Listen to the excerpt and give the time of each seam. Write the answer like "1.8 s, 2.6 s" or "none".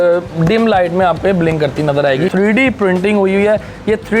2.3 s